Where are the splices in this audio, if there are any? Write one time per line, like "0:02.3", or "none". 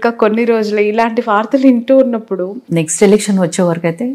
0:02.6